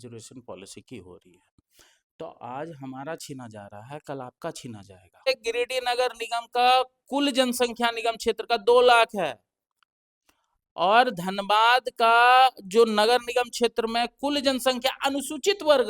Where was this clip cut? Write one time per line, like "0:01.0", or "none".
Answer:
0:05.3